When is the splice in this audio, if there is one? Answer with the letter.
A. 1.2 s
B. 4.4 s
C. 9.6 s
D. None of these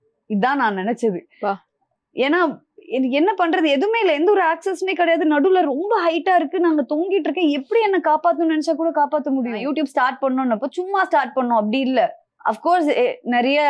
C